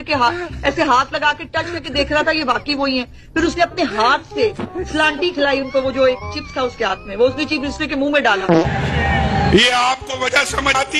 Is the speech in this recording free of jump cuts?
no; 1 cut; at 8.6 s

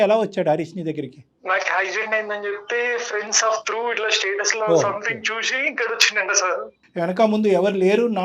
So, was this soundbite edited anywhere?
no; 0 cuts

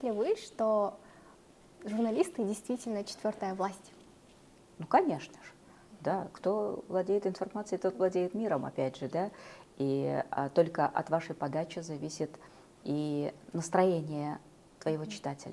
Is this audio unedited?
yes; 0 cuts

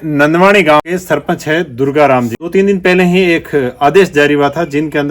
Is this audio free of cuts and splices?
no; 2 cuts; at 0.8 s, 2.4 s

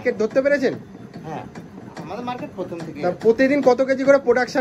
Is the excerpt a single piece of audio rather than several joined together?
yes; 0 cuts

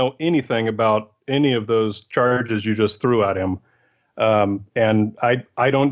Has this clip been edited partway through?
no; 0 cuts

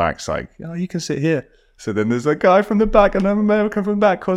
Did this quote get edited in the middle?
no; 0 cuts

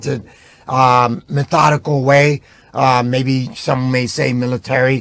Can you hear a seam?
no; 0 cuts

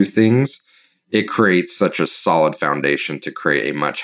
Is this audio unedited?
yes; 0 cuts

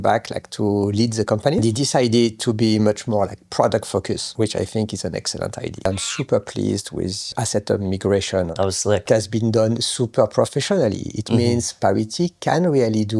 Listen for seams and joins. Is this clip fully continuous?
no; 5 cuts; at 1.6 s, 4.3 s, 5.9 s, 7.3 s, 8.5 s

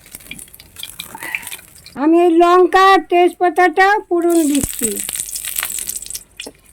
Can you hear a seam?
no; 0 cuts

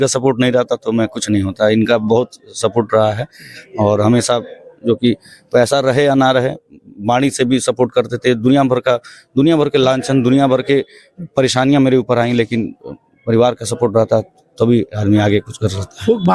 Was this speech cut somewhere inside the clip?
no; 0 cuts

